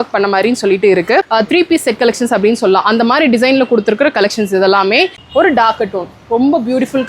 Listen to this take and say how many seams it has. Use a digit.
2